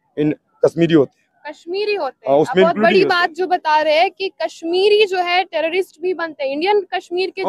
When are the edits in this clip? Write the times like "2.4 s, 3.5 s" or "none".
none